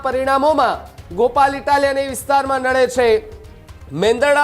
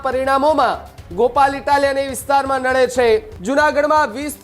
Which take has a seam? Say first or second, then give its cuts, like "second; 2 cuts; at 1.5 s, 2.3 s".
second; 1 cut; at 3.3 s